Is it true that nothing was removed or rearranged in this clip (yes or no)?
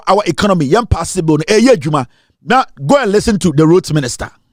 yes